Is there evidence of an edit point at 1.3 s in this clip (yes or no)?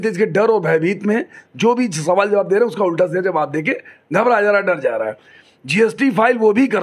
no